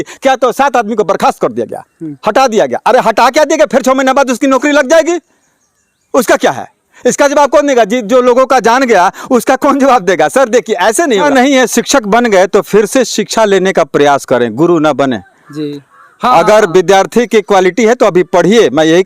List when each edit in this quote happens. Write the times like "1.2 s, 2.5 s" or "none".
11.2 s